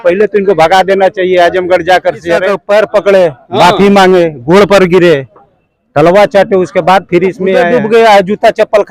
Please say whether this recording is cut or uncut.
cut